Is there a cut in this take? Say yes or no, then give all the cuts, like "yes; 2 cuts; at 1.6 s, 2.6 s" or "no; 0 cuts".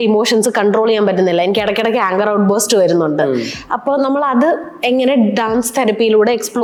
no; 0 cuts